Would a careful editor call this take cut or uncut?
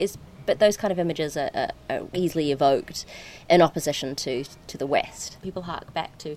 cut